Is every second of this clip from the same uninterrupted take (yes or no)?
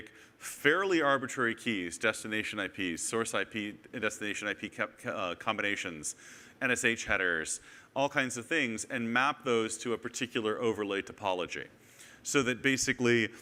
yes